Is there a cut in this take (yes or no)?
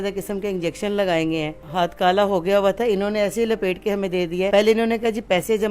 yes